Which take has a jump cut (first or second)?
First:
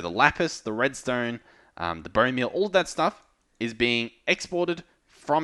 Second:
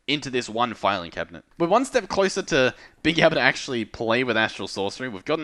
second